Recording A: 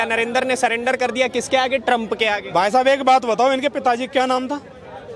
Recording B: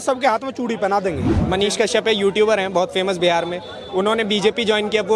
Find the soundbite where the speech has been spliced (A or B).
B